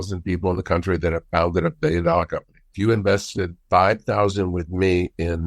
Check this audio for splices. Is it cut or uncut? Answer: cut